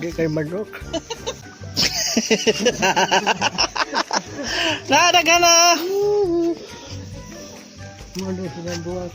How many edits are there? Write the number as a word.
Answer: one